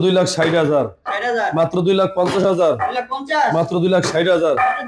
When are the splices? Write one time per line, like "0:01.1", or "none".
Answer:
none